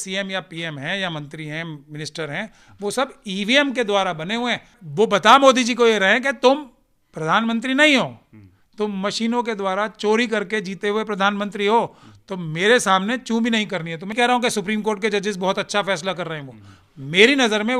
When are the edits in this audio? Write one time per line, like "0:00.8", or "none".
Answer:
0:04.8
0:14.1